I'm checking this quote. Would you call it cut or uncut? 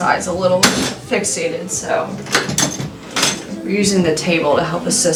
uncut